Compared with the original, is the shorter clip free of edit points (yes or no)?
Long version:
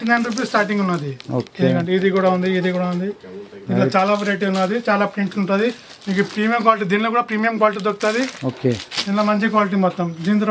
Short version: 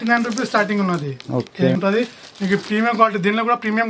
no